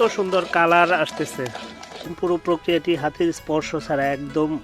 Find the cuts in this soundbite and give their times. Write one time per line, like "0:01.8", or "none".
0:02.1